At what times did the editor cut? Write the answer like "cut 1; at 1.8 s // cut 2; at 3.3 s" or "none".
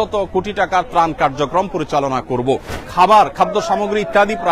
cut 1; at 2.8 s